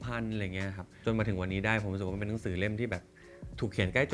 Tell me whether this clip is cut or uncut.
cut